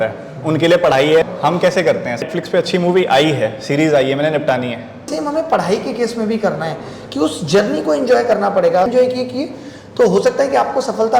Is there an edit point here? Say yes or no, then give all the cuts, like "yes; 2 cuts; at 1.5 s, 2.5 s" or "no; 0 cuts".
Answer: yes; 4 cuts; at 1.2 s, 2.2 s, 5.1 s, 8.9 s